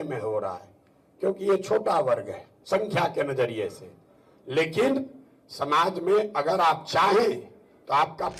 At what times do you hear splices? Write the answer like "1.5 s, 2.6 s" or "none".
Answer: none